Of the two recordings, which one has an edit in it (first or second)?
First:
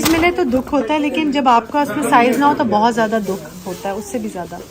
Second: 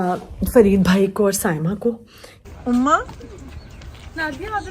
second